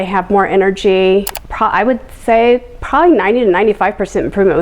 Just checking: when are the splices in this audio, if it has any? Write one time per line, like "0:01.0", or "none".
0:01.3